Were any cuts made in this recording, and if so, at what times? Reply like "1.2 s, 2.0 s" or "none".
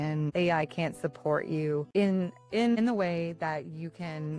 1.9 s